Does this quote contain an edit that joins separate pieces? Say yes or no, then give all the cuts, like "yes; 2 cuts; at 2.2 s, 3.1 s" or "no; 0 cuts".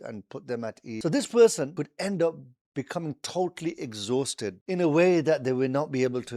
yes; 3 cuts; at 1.0 s, 1.7 s, 4.6 s